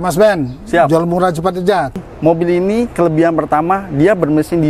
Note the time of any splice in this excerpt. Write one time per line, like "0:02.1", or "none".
0:01.9